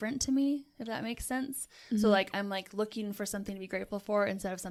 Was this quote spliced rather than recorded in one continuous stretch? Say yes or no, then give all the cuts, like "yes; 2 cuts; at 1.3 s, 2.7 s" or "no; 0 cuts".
no; 0 cuts